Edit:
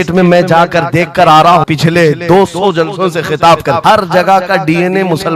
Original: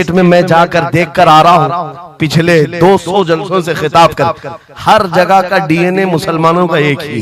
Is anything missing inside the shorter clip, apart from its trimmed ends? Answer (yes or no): yes